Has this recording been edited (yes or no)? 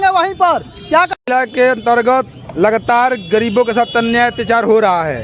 yes